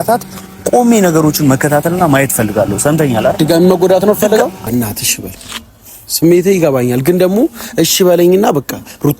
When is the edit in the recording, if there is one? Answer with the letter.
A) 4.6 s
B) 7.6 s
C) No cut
A